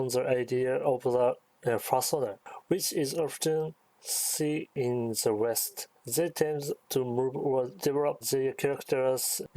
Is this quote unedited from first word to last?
no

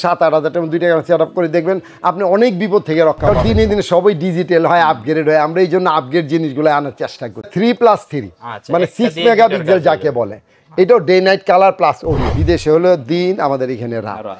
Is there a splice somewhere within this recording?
yes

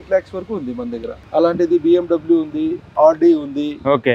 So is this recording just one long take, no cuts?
no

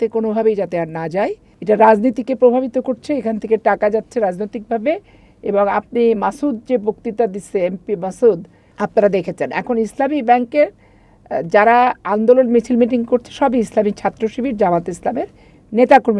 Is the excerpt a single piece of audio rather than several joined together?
no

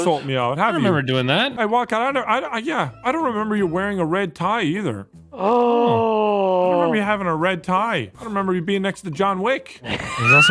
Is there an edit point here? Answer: yes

